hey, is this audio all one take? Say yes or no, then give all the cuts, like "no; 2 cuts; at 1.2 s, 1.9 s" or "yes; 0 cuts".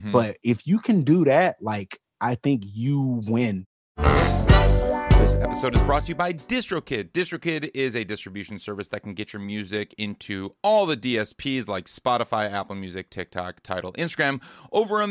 no; 1 cut; at 3.7 s